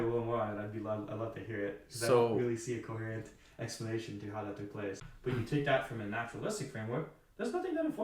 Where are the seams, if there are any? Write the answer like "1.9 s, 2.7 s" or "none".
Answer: 5.1 s